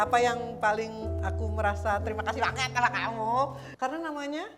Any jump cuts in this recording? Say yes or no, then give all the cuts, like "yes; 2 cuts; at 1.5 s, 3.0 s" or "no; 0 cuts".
yes; 1 cut; at 3.6 s